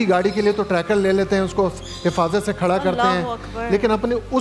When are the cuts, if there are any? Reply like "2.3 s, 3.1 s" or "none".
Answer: none